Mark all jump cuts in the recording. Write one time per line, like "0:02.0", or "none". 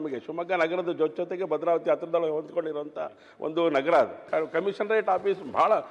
0:04.3

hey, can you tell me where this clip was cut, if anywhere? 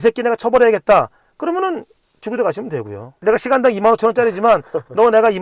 0:03.1

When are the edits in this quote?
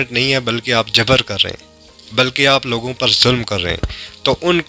none

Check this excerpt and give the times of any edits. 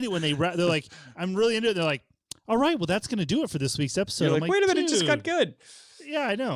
none

